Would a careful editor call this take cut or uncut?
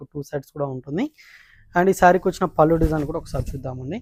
uncut